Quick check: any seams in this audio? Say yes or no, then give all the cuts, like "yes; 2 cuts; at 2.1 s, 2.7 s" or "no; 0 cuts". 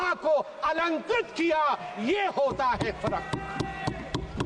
no; 0 cuts